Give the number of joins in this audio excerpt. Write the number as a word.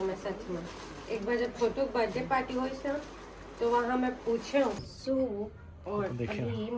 one